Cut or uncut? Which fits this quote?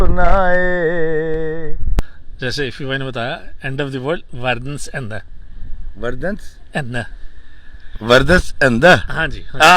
cut